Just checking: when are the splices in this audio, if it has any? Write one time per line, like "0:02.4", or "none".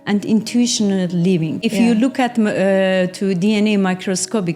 0:01.7